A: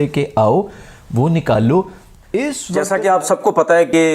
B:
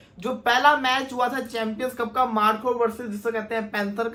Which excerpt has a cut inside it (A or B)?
A